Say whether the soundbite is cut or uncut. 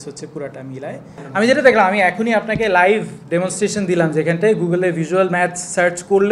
cut